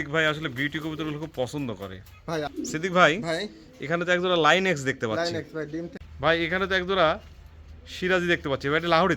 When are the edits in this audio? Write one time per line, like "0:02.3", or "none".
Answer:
0:02.5
0:06.0